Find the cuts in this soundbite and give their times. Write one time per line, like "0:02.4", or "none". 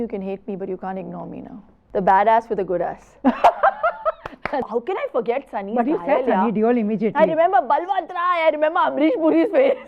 0:01.7
0:04.7